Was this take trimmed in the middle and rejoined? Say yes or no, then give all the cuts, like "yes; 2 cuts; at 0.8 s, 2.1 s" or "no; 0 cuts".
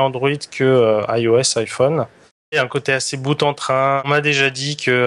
yes; 2 cuts; at 2.5 s, 4.1 s